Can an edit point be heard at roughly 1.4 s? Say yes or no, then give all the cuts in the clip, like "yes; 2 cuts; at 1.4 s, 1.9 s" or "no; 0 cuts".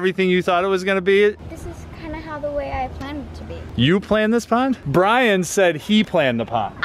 yes; 1 cut; at 1.4 s